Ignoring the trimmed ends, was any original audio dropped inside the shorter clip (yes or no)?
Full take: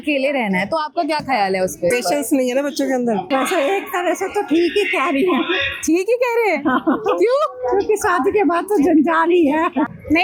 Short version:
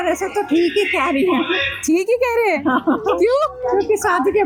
no